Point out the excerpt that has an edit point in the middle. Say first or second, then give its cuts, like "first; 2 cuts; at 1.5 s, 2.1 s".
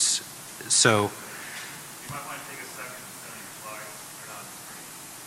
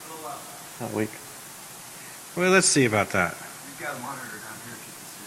first; 1 cut; at 3.5 s